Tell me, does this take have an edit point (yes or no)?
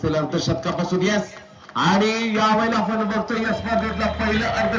no